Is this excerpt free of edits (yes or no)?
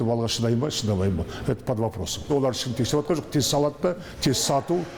no